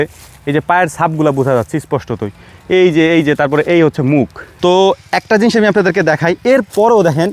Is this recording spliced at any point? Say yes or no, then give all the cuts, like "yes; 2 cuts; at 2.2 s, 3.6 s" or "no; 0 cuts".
yes; 1 cut; at 4.4 s